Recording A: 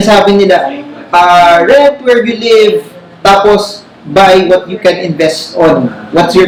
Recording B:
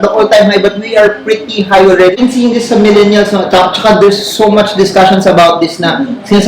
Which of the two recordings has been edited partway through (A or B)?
B